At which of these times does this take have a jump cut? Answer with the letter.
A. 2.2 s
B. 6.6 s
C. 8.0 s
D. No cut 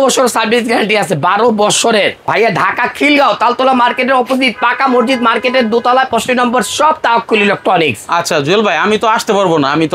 A